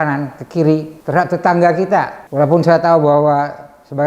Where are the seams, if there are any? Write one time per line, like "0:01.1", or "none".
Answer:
0:01.0
0:02.2